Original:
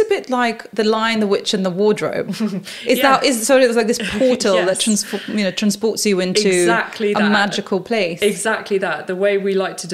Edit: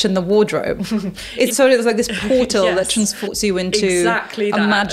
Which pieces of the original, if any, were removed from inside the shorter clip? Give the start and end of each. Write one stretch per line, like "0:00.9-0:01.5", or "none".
0:03.0-0:03.4
0:05.2-0:06.0